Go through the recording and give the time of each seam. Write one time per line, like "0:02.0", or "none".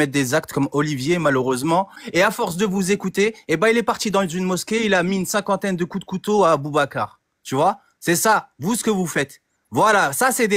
0:02.0

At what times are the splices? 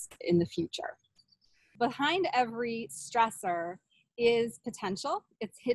0:01.6

